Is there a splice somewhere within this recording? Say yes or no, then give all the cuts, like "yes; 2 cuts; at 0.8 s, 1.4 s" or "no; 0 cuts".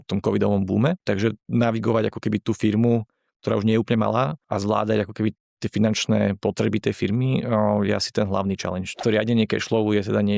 yes; 3 cuts; at 1.0 s, 4.4 s, 9.0 s